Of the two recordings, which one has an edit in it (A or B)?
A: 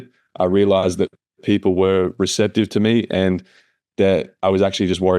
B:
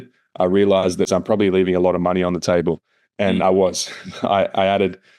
B